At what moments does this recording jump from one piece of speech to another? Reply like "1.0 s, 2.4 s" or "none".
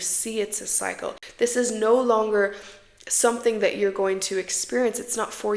1.2 s